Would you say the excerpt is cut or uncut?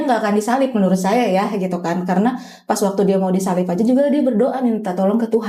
uncut